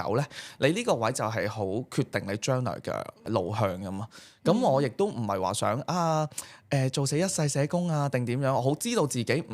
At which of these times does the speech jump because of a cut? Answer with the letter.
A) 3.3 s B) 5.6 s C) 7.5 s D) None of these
A